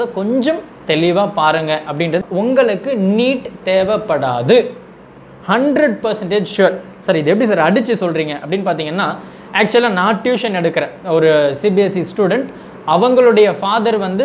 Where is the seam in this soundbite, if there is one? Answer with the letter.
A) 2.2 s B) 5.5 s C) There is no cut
A